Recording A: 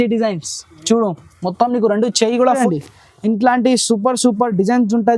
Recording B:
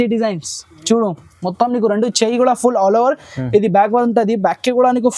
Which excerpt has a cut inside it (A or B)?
A